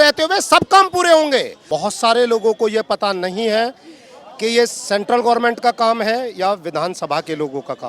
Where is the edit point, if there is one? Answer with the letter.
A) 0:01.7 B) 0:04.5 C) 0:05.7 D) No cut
A